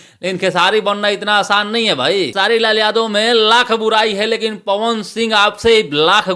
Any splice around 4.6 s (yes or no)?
no